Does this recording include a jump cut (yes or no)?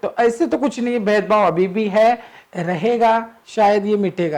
yes